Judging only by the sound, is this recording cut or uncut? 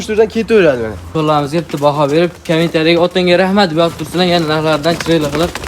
cut